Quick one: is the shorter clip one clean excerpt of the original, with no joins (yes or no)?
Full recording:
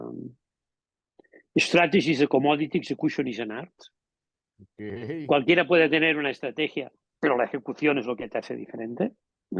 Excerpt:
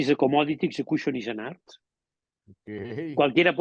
yes